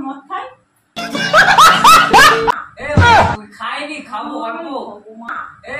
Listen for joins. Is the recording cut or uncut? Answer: cut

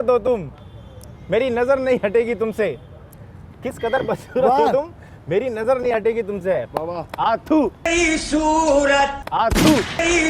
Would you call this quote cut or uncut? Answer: uncut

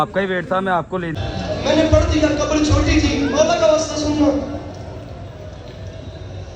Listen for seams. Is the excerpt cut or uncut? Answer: cut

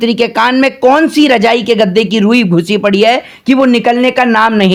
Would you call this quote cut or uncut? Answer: uncut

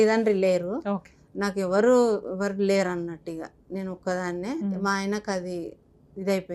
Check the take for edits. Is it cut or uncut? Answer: uncut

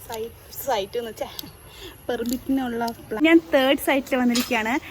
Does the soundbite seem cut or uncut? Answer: cut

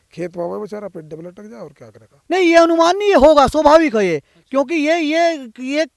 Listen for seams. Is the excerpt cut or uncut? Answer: cut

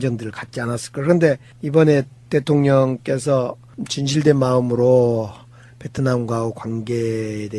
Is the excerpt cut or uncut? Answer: cut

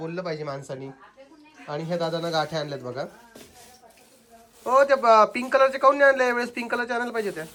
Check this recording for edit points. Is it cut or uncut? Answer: uncut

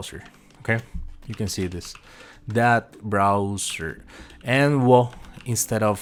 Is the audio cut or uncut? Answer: uncut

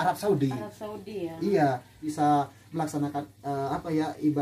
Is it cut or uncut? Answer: cut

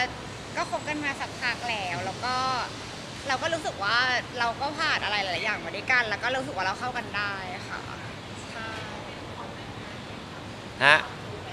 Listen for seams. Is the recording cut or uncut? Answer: uncut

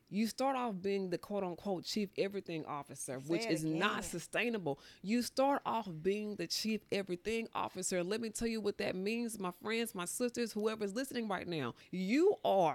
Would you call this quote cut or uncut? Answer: cut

